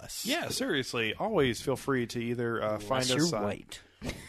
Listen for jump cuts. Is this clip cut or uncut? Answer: uncut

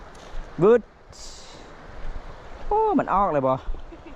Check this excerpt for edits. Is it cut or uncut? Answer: uncut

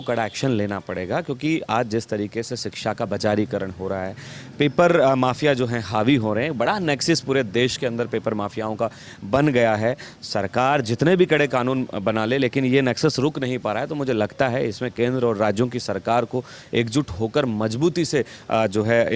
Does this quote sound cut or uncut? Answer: uncut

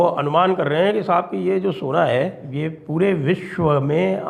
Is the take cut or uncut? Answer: cut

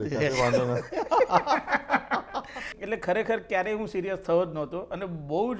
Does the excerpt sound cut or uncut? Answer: cut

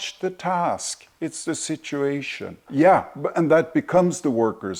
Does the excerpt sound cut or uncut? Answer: uncut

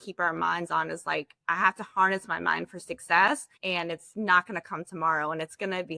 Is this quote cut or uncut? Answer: cut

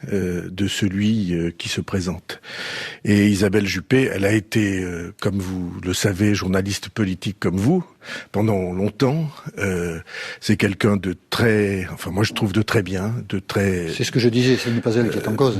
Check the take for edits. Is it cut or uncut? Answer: cut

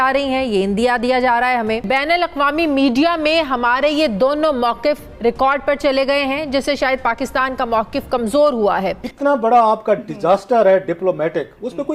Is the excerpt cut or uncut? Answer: cut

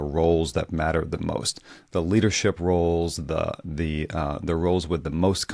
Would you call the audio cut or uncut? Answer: uncut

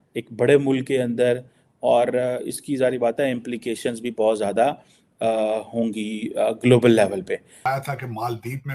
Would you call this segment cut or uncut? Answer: cut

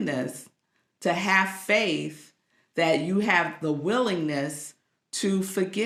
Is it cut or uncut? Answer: uncut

